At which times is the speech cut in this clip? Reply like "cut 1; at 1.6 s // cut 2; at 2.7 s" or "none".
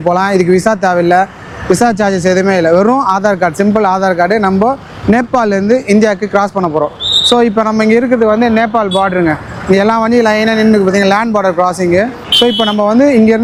none